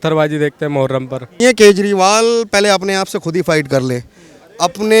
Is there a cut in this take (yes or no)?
yes